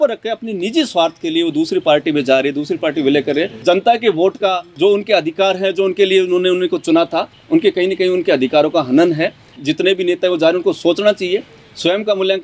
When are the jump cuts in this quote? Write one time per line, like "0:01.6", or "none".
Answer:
0:03.5
0:04.7
0:09.6